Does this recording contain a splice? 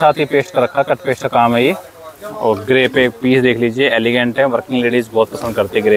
no; 0 cuts

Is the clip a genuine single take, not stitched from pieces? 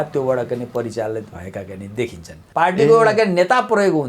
no; 1 cut; at 2.4 s

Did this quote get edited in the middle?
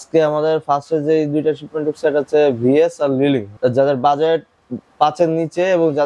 yes; 1 cut; at 3.5 s

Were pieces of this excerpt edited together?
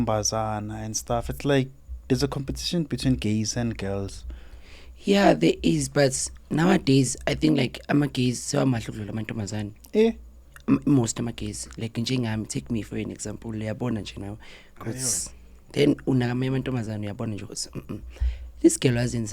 no; 0 cuts

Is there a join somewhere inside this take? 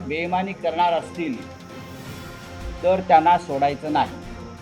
no; 0 cuts

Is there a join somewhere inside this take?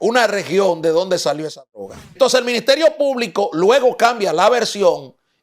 yes; 1 cut; at 2.1 s

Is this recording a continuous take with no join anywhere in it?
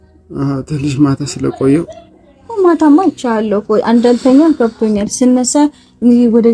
yes; 0 cuts

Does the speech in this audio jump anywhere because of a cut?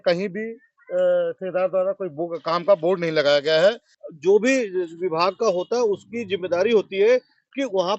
yes; 1 cut; at 3.9 s

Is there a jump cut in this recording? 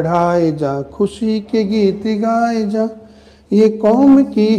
no; 0 cuts

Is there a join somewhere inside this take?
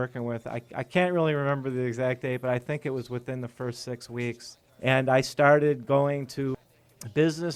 no; 0 cuts

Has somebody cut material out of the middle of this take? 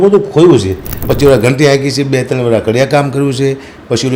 yes; 1 cut; at 1.0 s

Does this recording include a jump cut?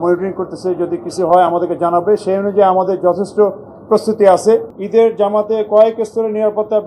yes; 1 cut; at 4.8 s

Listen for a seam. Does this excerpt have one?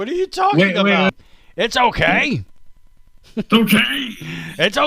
yes; 1 cut; at 1.1 s

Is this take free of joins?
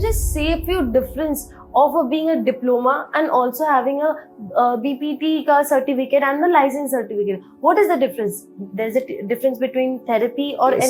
yes; 0 cuts

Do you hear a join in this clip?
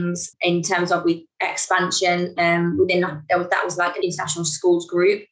no; 0 cuts

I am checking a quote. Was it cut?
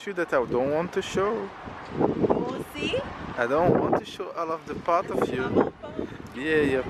no; 0 cuts

